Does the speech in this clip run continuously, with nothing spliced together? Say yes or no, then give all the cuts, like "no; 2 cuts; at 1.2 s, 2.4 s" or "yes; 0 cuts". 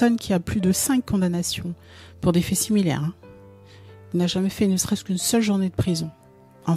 yes; 0 cuts